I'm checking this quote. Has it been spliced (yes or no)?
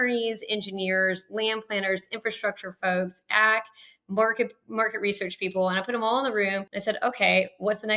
yes